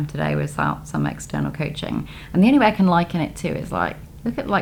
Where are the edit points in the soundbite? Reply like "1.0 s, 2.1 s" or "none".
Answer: none